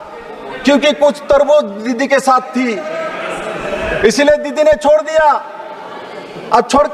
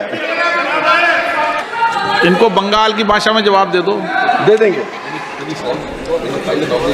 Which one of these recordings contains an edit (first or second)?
second